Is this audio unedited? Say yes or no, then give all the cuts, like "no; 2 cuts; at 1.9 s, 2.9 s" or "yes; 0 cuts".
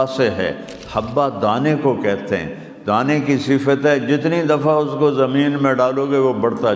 yes; 0 cuts